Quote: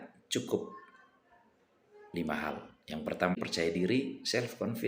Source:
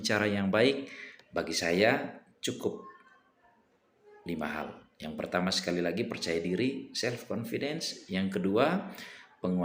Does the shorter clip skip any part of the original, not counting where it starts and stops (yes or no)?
yes